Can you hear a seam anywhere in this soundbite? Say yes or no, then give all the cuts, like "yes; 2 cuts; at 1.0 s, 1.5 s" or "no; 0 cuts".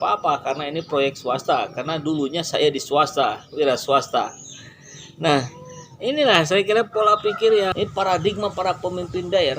yes; 1 cut; at 7.7 s